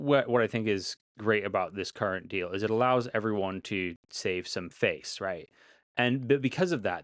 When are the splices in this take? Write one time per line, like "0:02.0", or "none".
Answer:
none